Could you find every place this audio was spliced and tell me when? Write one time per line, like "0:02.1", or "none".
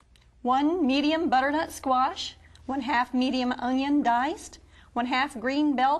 0:01.9